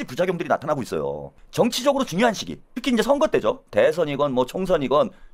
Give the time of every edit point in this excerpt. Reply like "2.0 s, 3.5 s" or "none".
1.4 s